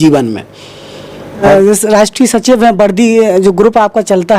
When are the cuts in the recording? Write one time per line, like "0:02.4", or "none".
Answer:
0:01.4